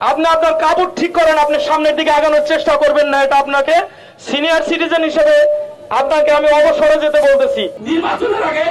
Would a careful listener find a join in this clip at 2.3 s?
no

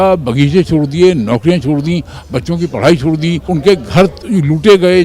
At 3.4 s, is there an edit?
yes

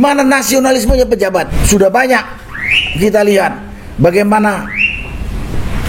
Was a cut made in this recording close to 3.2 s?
no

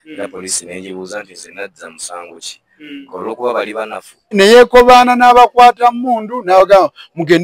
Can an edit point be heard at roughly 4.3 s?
yes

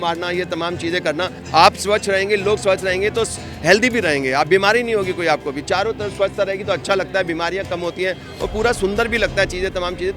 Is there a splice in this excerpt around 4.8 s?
no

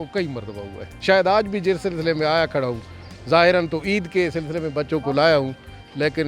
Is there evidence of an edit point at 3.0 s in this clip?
no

